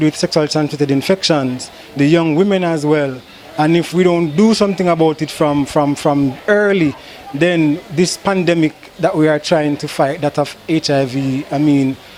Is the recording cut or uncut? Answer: uncut